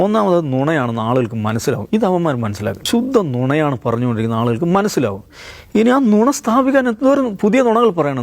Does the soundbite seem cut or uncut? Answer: cut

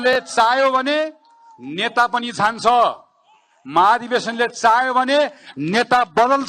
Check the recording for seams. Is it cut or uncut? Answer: uncut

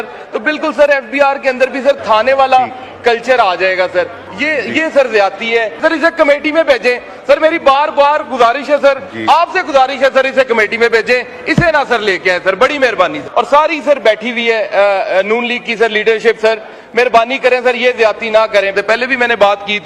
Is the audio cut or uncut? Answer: cut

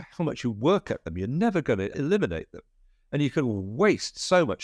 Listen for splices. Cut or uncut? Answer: cut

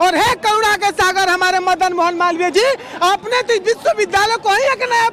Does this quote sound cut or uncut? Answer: uncut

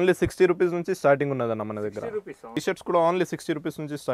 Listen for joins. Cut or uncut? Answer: cut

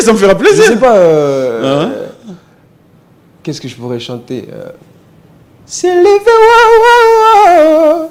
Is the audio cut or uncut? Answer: uncut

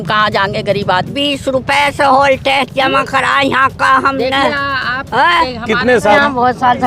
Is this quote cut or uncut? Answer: cut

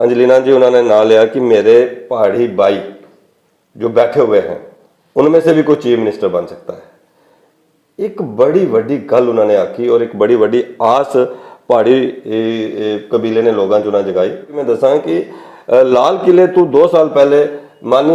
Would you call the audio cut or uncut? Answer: cut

